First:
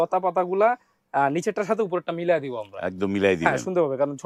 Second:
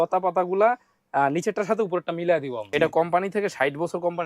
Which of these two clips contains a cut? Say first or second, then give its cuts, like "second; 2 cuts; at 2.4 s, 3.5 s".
second; 1 cut; at 2.7 s